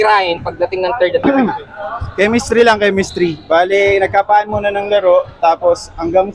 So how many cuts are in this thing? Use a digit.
1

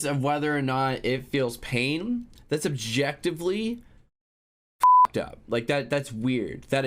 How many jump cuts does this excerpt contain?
0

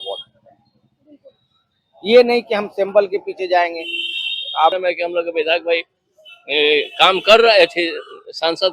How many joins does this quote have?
1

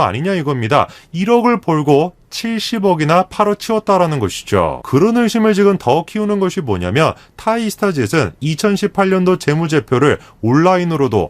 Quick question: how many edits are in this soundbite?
1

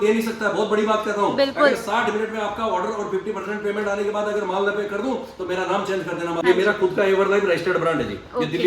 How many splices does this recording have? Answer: 1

